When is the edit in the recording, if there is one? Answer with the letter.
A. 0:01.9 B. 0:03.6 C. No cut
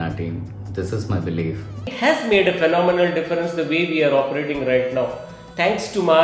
A